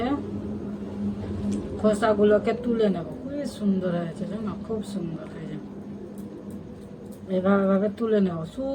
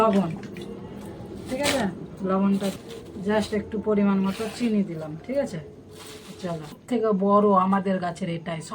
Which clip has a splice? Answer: second; 2 cuts; at 2.8 s, 6.7 s

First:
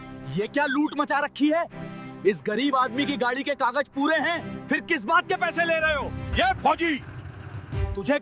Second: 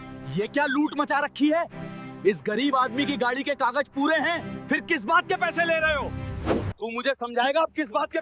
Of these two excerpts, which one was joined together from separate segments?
first; 1 cut; at 6.2 s

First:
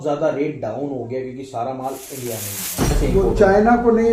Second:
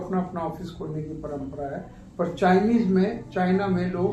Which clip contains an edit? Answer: first; 1 cut; at 3.0 s

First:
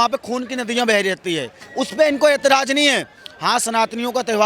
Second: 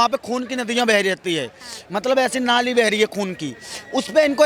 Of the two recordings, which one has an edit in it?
first; 1 cut; at 1.6 s

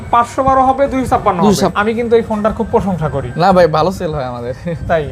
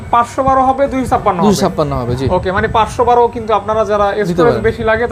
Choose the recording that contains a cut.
first; 1 cut; at 1.7 s

